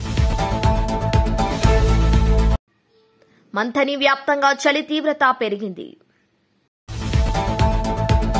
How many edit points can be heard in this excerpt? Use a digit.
0